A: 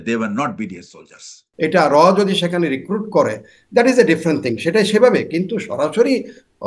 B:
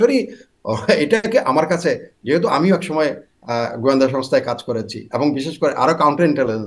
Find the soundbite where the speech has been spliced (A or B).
A